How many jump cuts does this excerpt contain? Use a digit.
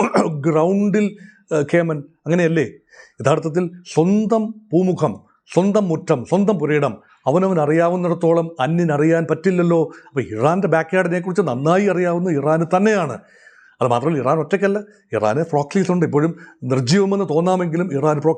0